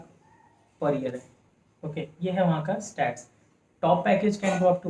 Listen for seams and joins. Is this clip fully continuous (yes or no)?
yes